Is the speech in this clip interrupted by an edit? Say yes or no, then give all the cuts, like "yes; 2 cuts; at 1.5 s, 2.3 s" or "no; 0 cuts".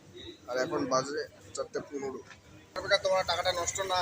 yes; 1 cut; at 2.8 s